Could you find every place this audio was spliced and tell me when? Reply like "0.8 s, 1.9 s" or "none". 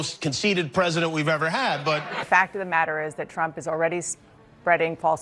none